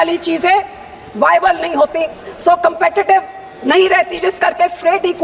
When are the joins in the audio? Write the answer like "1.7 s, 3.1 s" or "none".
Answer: none

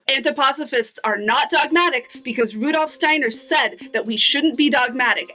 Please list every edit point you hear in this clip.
none

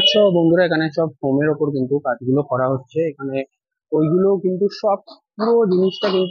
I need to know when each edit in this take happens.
none

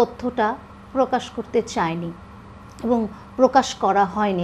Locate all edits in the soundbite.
none

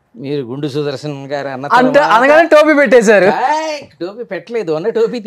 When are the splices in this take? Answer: none

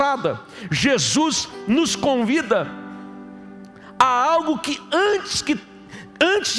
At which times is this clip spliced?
none

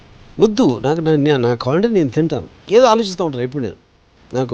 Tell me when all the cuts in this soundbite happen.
2.5 s

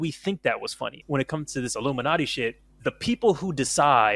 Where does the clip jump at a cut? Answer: 0.9 s, 2.7 s

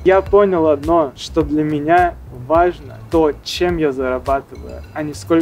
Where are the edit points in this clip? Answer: 1.2 s, 2.9 s

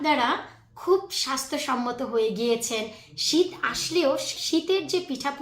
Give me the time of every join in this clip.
4.4 s

